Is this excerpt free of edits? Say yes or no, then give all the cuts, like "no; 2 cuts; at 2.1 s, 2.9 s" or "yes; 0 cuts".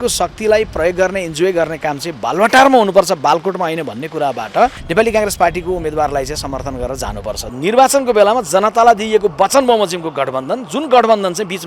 no; 2 cuts; at 4.8 s, 7.4 s